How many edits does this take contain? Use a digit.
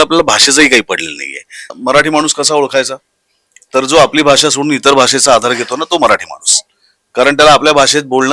1